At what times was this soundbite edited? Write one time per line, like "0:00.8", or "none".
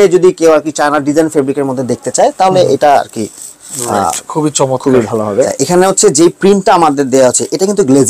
0:05.5